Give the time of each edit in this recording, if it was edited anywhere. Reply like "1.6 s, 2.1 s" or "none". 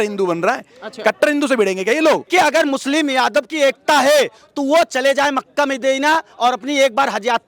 2.3 s